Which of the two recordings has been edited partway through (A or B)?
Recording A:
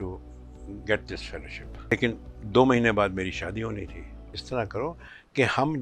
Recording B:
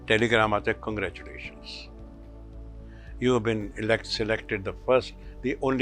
A